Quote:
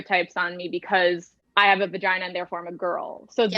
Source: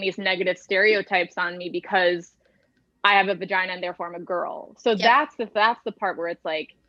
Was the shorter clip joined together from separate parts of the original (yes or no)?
yes